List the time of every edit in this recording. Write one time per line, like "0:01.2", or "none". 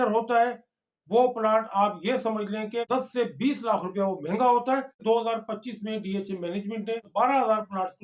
0:02.9
0:05.0
0:07.1